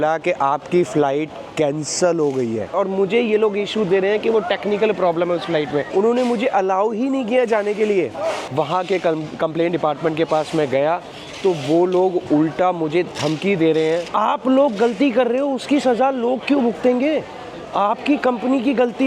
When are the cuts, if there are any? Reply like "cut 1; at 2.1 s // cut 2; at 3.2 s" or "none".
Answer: cut 1; at 2.7 s // cut 2; at 5.9 s // cut 3; at 8.4 s // cut 4; at 14.1 s